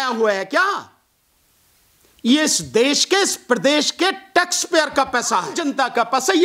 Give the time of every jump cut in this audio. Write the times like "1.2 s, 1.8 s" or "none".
5.5 s